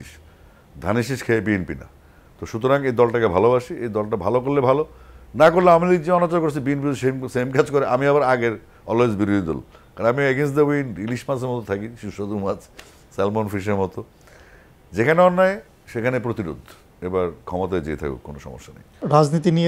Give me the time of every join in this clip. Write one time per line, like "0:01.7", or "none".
none